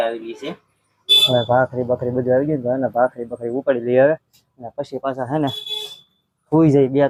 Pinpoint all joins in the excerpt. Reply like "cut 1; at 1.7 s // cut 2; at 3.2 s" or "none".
none